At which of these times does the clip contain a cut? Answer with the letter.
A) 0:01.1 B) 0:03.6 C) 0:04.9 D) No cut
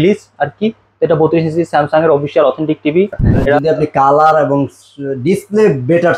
B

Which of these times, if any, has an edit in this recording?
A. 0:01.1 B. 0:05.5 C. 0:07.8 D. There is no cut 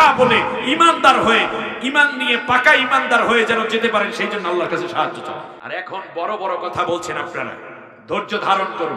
B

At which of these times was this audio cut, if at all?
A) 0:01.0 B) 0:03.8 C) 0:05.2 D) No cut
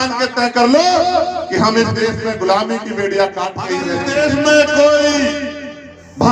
B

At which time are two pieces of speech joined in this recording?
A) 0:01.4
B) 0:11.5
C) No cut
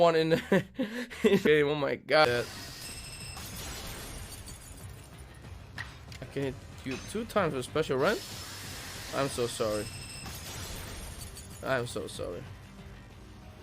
A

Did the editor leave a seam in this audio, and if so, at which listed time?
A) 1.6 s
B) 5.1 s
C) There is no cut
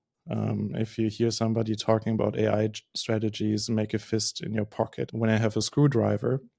B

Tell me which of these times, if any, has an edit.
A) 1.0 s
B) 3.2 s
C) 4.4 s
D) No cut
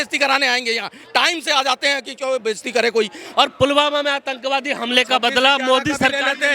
B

